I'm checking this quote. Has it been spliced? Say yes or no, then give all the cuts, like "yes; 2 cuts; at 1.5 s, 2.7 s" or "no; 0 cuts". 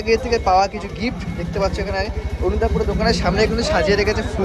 no; 0 cuts